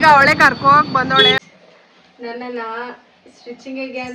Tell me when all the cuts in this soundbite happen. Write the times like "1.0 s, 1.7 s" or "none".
1.4 s